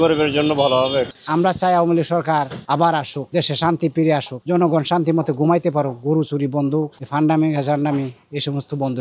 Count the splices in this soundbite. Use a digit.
1